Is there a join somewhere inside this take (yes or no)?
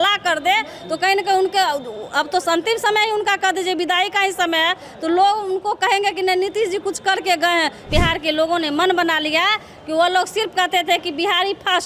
yes